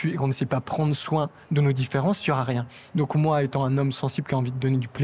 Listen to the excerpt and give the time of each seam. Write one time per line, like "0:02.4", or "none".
none